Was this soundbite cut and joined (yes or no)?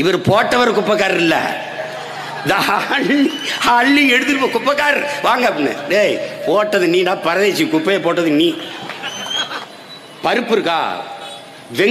yes